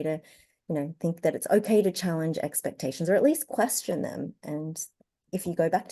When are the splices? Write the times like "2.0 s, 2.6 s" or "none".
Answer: none